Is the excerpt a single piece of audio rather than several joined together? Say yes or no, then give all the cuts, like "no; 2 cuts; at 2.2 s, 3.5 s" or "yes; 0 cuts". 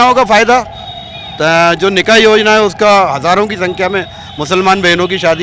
yes; 0 cuts